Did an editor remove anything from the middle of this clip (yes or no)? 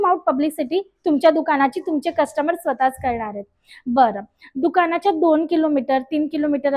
no